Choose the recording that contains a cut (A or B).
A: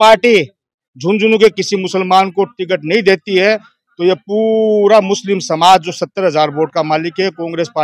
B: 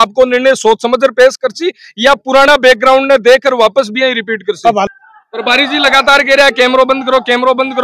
B